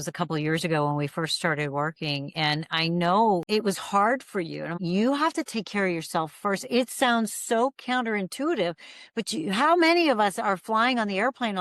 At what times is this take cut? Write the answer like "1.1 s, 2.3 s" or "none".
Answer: 3.4 s, 4.7 s